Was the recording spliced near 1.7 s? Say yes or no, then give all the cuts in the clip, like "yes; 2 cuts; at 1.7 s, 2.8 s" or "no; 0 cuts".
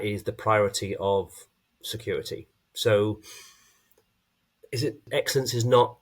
no; 1 cut; at 5.1 s